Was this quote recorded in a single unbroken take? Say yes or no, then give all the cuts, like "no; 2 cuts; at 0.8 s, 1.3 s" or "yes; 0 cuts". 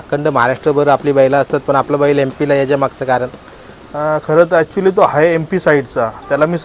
yes; 0 cuts